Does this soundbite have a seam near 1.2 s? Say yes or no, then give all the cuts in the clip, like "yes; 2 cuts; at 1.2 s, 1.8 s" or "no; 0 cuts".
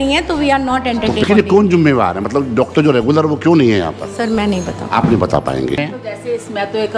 yes; 2 cuts; at 1.2 s, 5.8 s